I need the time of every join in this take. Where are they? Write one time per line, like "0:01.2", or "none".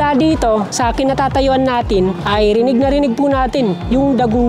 0:02.2